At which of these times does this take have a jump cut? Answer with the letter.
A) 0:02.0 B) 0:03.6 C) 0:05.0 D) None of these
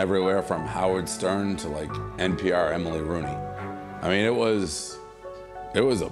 D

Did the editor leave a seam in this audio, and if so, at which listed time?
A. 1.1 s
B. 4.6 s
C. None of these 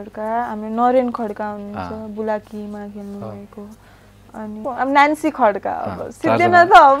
B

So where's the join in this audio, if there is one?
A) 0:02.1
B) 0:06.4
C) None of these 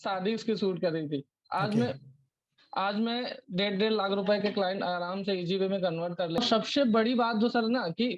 B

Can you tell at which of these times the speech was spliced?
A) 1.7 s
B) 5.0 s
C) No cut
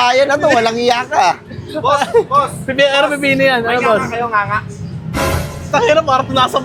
C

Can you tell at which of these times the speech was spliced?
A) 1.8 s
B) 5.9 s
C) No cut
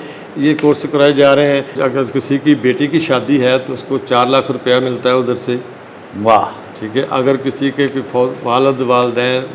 A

